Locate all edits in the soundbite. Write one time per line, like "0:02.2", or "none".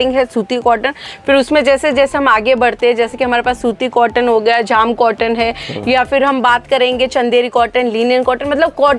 none